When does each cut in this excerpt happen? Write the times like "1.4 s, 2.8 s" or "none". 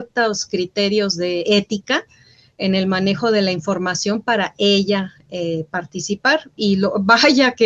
none